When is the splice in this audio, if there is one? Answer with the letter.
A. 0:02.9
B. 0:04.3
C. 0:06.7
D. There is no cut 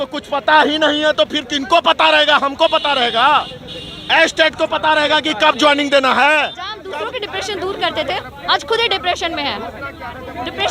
C